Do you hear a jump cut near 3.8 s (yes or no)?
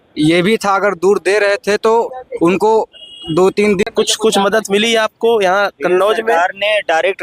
yes